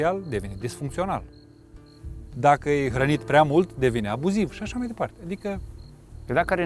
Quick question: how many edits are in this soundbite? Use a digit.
0